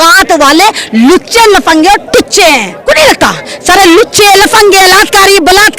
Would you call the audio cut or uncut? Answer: cut